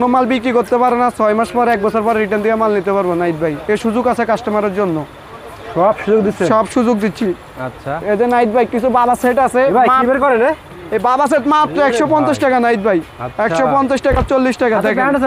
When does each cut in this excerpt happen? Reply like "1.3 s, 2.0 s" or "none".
none